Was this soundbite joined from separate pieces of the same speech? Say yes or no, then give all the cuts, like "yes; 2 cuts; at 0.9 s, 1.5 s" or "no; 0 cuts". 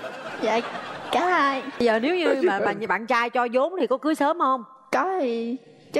no; 0 cuts